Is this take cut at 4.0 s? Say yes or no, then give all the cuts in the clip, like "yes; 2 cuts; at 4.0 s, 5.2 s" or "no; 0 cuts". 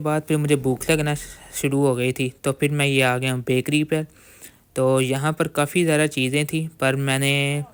no; 0 cuts